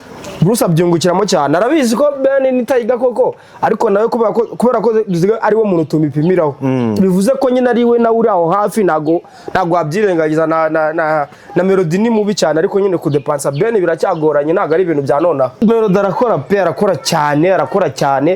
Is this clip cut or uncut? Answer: cut